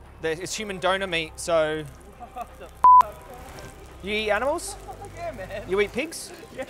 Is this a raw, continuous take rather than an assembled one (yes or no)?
yes